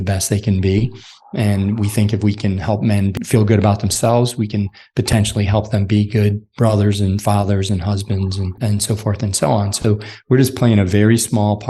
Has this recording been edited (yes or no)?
yes